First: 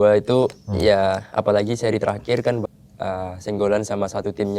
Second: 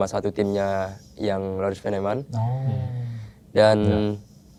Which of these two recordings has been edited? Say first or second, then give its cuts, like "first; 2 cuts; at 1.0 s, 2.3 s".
first; 1 cut; at 2.6 s